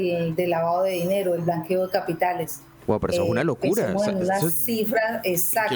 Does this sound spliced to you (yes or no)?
no